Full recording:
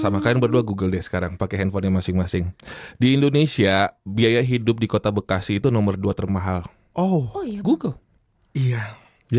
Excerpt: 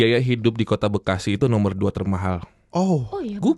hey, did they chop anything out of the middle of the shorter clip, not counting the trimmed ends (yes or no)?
no